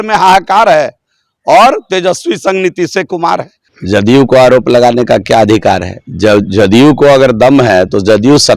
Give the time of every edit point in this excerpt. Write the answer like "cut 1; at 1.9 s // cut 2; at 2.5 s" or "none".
cut 1; at 3.5 s